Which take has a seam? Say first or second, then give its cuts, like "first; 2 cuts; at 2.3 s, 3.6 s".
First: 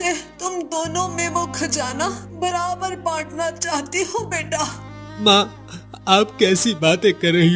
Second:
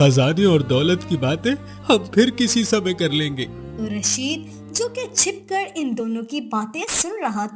second; 1 cut; at 3.6 s